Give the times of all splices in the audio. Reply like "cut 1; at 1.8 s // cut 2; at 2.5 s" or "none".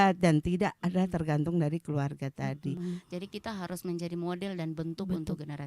cut 1; at 2.8 s